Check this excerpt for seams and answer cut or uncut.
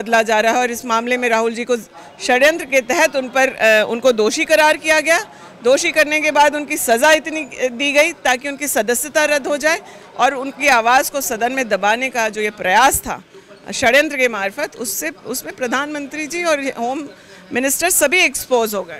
uncut